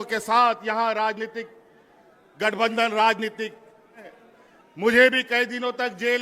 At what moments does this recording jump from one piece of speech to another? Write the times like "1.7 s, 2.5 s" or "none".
4.0 s